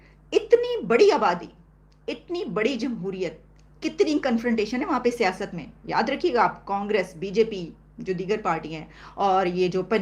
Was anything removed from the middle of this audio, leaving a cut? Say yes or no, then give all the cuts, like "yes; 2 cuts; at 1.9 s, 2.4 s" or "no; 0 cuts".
no; 0 cuts